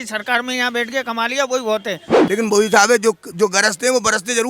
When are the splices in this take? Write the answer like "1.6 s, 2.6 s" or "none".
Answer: 2.1 s